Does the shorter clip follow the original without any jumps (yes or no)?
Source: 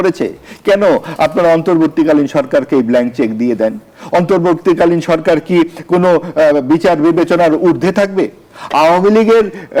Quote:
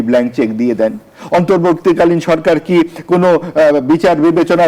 yes